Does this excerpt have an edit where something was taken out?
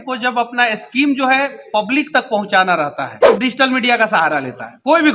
yes; 1 cut; at 3.4 s

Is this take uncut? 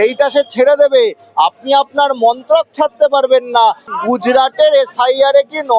no; 1 cut; at 3.9 s

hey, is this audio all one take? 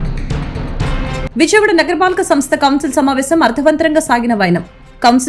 no; 1 cut; at 0.9 s

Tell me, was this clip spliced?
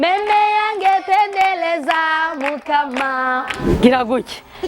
yes; 1 cut; at 3.6 s

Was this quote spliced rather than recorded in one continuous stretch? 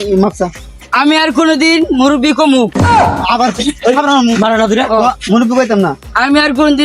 no; 0 cuts

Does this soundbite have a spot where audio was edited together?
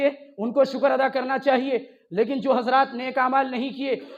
no; 0 cuts

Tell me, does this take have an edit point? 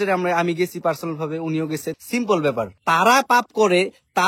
yes; 2 cuts; at 1.9 s, 2.7 s

